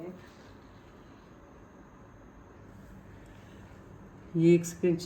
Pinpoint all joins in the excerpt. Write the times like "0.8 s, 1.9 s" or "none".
2.6 s